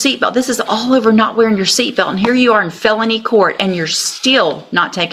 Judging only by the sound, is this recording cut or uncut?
uncut